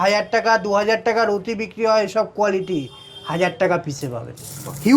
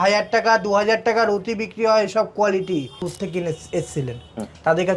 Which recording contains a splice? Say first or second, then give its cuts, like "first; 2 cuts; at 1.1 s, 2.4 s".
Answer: second; 1 cut; at 3.1 s